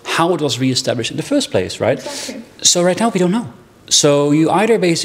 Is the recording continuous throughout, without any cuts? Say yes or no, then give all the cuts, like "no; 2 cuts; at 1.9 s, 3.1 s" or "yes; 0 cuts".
yes; 0 cuts